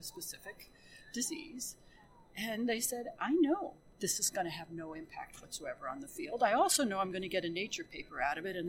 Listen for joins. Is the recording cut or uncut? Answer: cut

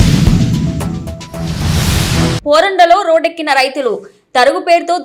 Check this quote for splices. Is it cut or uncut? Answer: uncut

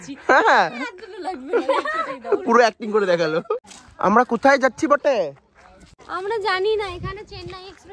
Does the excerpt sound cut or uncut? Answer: cut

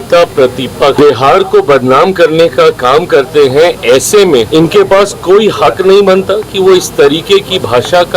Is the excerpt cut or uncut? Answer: cut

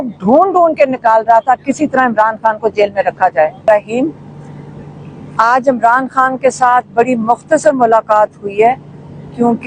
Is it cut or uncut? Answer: cut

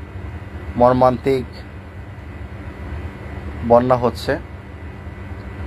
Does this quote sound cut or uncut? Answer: uncut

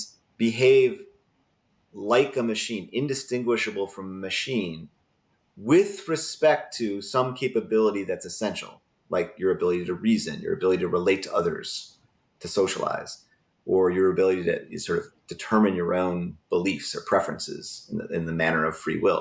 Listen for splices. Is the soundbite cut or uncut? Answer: uncut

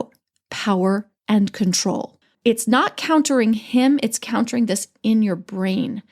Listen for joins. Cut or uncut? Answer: cut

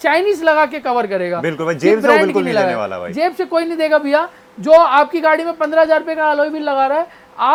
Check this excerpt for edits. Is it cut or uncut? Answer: uncut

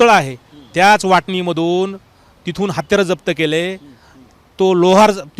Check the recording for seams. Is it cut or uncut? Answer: uncut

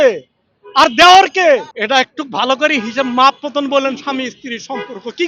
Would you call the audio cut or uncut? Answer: cut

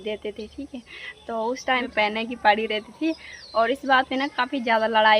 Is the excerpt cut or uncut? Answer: cut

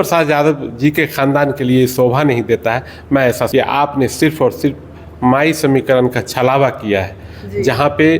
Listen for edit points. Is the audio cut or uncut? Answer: cut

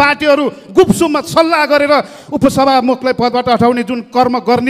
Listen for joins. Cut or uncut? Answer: uncut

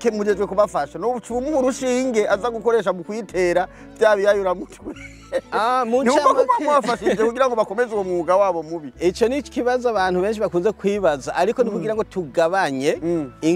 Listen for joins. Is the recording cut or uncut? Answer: uncut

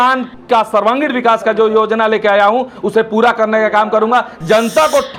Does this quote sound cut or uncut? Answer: uncut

